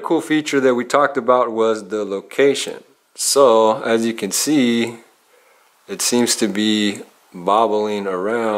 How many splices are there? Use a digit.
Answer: 0